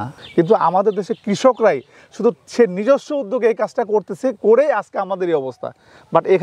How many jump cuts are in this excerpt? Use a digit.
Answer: 0